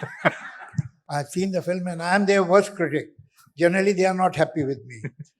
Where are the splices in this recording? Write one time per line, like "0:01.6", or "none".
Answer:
0:01.0